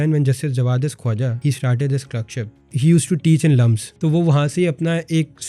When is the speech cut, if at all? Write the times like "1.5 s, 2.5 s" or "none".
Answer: 1.4 s, 2.7 s, 3.8 s